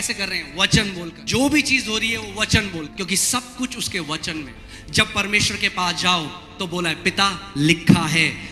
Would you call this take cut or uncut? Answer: cut